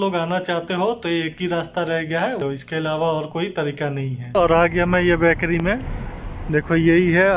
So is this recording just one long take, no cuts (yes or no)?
no